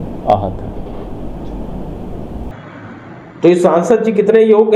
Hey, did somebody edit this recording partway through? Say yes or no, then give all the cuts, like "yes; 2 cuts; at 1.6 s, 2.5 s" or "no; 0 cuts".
yes; 1 cut; at 2.5 s